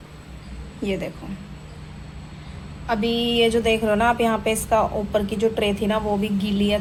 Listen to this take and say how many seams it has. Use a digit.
0